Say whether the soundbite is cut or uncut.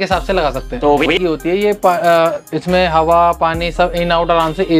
cut